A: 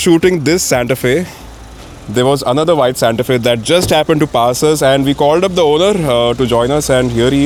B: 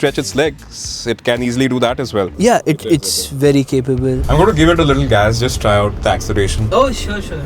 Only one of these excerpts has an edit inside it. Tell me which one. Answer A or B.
B